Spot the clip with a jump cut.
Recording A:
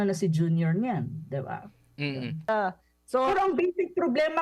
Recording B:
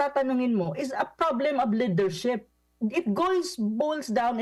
A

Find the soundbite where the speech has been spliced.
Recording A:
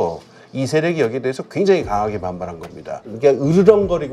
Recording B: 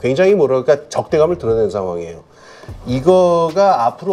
A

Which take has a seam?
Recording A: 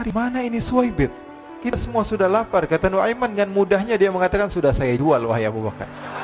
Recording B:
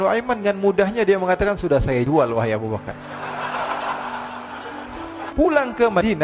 B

